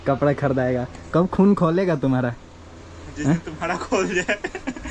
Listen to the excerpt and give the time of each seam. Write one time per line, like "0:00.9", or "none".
none